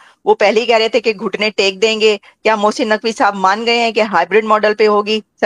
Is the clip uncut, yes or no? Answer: yes